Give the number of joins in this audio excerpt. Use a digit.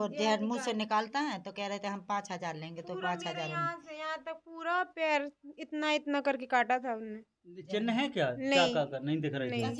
0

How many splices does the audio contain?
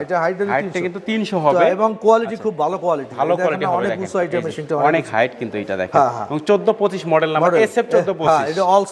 0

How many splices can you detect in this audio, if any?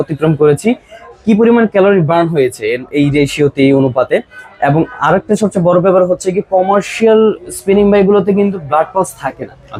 0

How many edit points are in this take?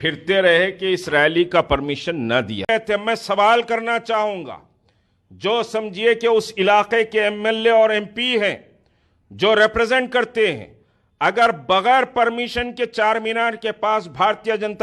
1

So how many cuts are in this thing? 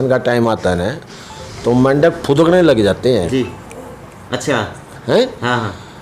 0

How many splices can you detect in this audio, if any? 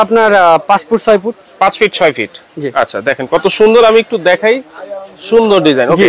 0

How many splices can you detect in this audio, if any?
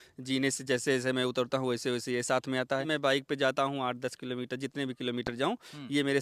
1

